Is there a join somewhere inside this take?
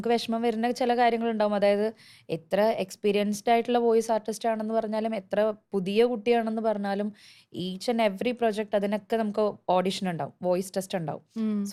no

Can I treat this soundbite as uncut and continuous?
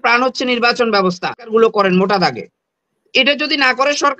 no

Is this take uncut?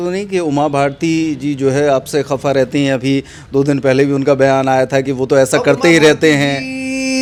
yes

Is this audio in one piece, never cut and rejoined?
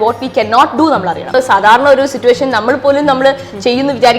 no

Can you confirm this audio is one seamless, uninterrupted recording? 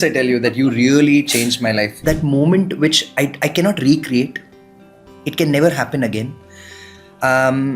no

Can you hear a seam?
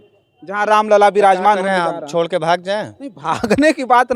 no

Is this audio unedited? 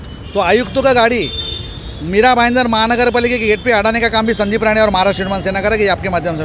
yes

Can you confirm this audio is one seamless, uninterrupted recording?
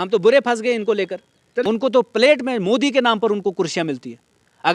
no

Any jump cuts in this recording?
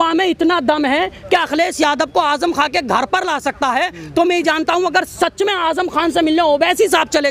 no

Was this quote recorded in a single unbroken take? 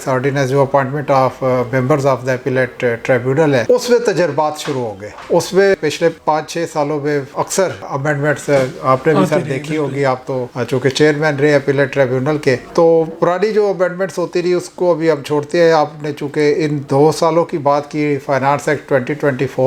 yes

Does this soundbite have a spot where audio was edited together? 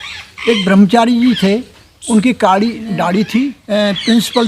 yes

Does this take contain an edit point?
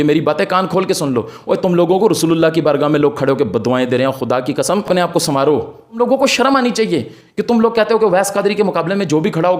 yes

